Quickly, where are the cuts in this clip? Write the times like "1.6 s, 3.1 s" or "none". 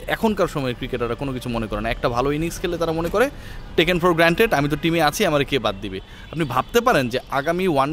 none